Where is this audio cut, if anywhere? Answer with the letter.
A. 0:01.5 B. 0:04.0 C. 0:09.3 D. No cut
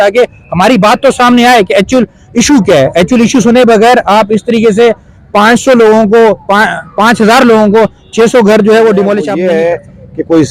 C